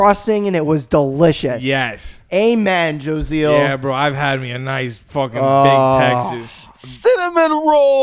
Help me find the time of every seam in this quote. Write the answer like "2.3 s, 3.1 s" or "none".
none